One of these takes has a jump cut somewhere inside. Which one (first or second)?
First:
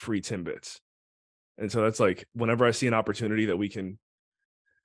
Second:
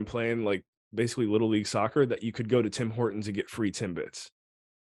first